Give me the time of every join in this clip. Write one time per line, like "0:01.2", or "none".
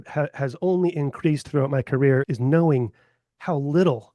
0:02.2